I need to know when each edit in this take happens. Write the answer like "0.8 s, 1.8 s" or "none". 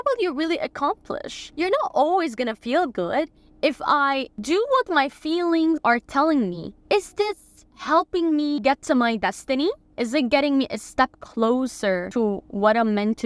1.4 s, 3.4 s, 5.8 s, 6.7 s, 8.6 s, 9.9 s, 12.1 s